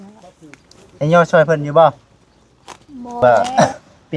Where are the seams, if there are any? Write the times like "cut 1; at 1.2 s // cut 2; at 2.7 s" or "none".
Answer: cut 1; at 3.1 s